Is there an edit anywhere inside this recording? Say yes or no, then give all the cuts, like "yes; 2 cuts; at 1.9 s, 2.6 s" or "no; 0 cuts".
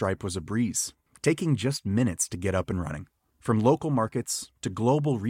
no; 0 cuts